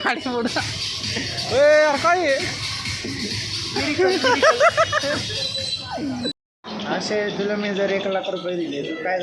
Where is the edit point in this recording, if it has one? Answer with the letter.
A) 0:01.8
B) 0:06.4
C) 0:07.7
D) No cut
B